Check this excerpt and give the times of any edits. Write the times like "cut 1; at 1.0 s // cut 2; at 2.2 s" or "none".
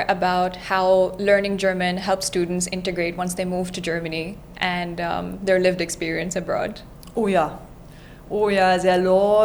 none